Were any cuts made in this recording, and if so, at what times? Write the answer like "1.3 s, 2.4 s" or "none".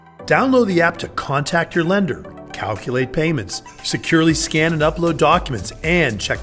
none